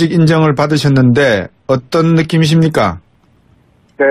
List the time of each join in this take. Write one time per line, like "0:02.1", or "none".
0:01.9